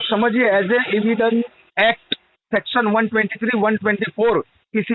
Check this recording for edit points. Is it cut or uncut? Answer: uncut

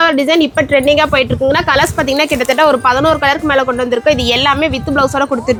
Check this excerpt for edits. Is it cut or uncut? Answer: uncut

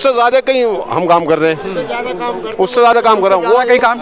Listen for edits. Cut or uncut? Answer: uncut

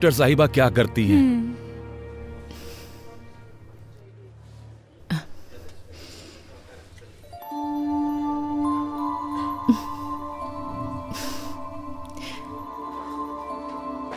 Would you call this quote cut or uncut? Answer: cut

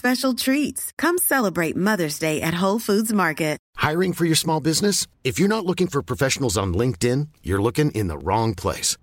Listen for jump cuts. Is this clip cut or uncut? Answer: cut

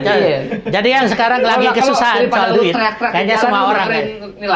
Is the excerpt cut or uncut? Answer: uncut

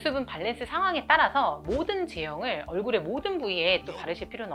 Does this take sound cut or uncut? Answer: uncut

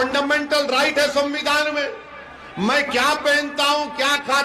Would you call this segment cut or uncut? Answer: uncut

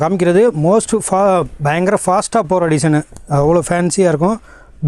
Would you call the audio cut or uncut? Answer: uncut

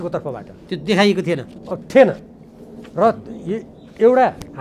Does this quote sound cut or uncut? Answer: uncut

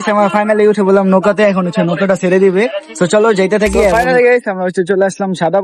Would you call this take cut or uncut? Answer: cut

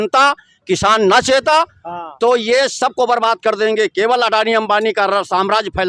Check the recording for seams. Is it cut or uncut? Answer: uncut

